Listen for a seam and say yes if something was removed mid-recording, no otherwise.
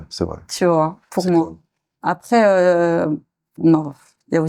no